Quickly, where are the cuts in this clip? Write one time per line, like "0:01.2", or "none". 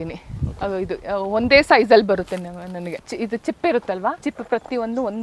0:03.1
0:04.2